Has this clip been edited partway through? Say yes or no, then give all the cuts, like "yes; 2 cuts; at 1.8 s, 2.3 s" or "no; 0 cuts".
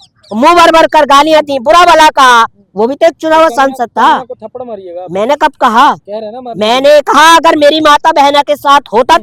no; 0 cuts